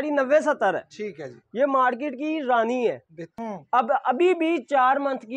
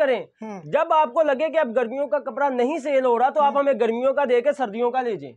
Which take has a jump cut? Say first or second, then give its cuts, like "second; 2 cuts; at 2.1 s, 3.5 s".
first; 1 cut; at 3.4 s